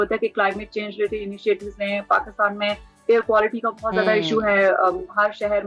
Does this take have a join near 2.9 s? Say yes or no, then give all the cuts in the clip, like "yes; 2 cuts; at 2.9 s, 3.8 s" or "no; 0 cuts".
no; 0 cuts